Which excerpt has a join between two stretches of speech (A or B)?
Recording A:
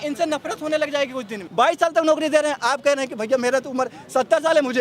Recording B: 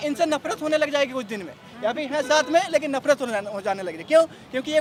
A